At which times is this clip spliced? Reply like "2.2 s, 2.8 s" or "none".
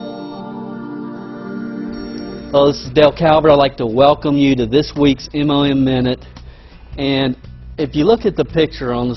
4.9 s